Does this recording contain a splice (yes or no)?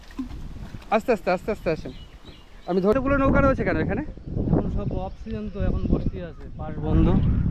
yes